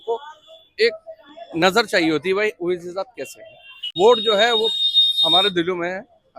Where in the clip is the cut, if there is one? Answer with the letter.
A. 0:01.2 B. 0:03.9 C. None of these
B